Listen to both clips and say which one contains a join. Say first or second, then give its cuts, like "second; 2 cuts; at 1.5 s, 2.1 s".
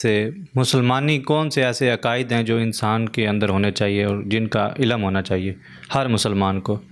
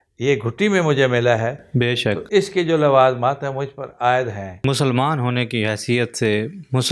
second; 1 cut; at 4.6 s